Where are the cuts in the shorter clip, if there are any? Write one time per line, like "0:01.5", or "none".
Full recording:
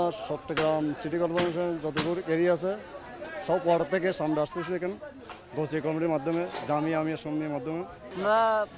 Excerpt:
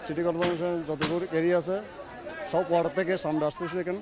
none